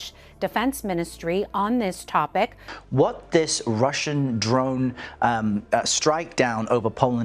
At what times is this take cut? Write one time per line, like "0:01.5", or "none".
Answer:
0:02.6